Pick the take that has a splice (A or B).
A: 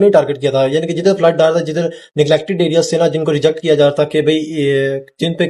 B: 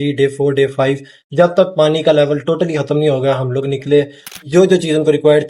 B